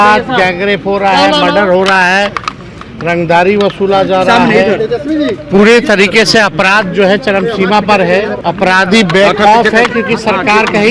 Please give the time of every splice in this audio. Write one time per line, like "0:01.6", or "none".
0:08.4